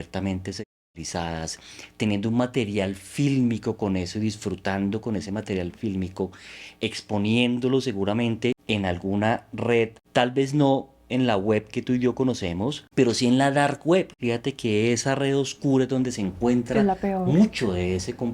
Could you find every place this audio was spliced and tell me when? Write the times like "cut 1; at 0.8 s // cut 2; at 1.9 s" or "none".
cut 1; at 8.6 s // cut 2; at 10.0 s // cut 3; at 12.8 s // cut 4; at 14.2 s